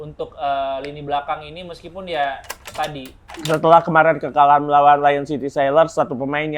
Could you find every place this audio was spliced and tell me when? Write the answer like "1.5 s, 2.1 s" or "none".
3.3 s